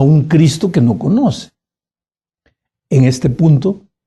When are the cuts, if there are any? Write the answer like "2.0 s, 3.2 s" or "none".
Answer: none